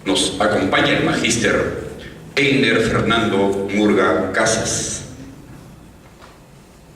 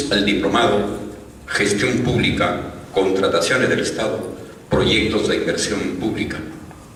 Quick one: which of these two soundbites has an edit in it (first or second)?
first